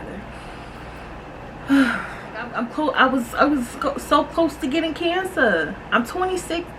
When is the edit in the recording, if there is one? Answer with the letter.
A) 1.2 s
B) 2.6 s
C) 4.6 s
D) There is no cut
B